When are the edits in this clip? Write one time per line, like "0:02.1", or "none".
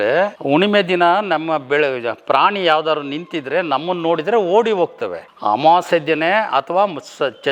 none